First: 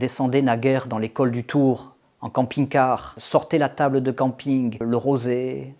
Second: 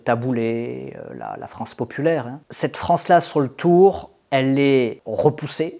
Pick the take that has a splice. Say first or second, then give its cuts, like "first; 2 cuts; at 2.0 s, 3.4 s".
first; 2 cuts; at 3.1 s, 4.8 s